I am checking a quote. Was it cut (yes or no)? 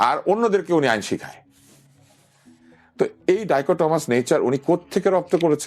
no